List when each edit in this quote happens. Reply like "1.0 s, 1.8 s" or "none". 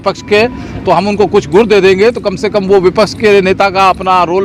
none